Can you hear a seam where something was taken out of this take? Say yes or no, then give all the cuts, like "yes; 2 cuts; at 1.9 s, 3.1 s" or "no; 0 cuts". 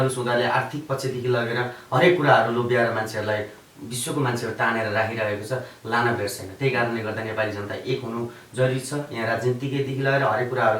no; 0 cuts